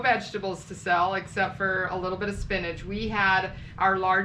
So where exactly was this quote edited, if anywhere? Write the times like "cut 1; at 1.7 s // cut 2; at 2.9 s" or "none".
none